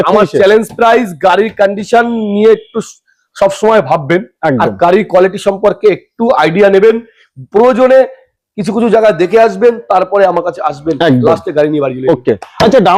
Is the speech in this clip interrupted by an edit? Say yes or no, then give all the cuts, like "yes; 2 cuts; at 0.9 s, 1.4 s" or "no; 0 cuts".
no; 0 cuts